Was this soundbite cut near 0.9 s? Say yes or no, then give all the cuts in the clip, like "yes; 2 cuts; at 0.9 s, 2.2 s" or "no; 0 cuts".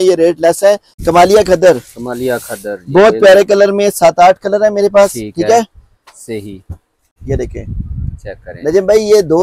yes; 2 cuts; at 0.9 s, 7.1 s